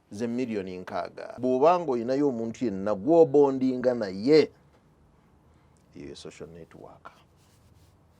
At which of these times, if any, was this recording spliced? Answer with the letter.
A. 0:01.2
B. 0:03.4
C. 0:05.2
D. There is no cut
A